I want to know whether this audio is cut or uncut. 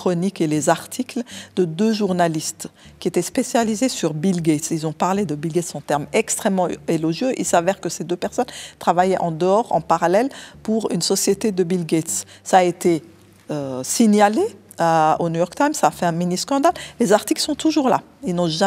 uncut